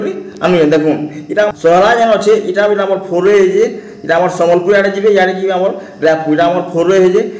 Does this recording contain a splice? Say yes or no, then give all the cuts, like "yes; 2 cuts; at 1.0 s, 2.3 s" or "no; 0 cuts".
yes; 1 cut; at 1.5 s